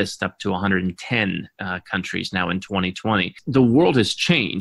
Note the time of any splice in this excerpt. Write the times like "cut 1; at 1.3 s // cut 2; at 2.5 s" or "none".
cut 1; at 3.4 s